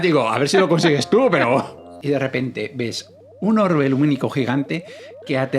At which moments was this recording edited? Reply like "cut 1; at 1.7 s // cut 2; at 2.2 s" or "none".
cut 1; at 1.9 s

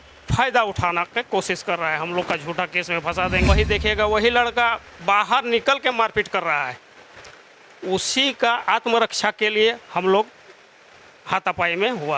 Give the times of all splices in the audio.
cut 1; at 3.5 s

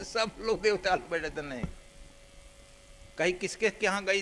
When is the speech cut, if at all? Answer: none

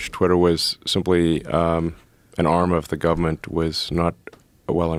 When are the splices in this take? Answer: none

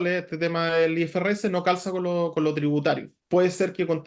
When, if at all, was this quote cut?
cut 1; at 3.1 s

